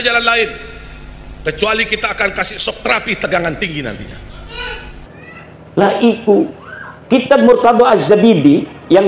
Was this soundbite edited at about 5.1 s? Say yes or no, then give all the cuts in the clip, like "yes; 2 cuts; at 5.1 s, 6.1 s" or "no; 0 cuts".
yes; 1 cut; at 5.1 s